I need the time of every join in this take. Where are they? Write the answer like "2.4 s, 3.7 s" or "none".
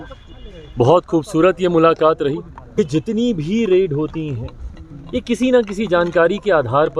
2.8 s